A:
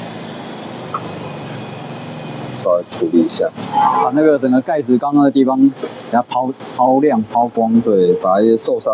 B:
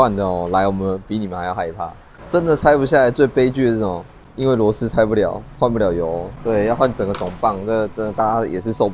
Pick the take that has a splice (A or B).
B